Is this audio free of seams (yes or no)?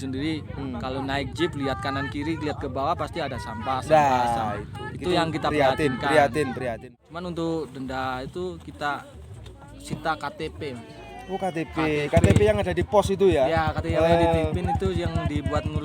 no